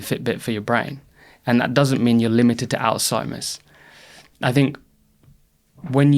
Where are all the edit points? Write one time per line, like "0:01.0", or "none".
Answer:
none